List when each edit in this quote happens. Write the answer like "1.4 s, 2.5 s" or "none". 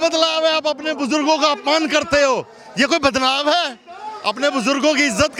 none

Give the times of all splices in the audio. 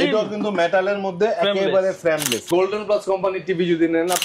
2.5 s

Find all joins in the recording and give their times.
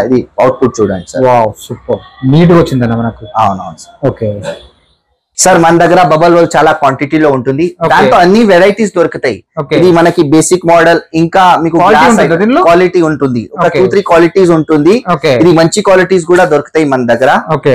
none

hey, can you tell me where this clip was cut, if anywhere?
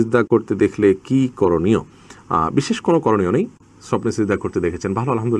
none

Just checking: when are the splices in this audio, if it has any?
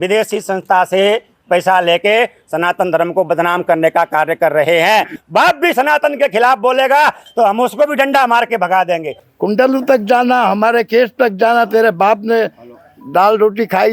5.2 s, 7.2 s, 9.2 s

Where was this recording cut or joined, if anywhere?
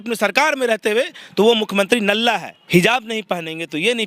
2.5 s

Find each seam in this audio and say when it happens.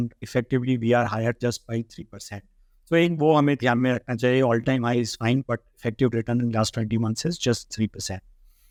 none

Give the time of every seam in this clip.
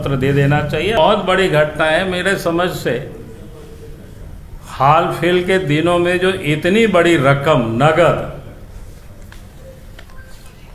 1.0 s

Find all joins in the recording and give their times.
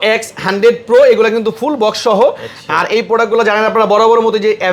none

